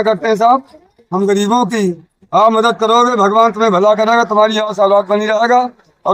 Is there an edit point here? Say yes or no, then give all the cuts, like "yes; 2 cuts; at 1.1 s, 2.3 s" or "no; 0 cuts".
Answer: no; 0 cuts